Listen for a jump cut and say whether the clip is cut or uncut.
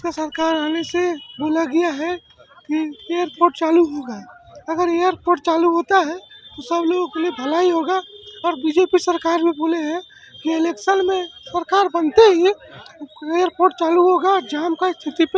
uncut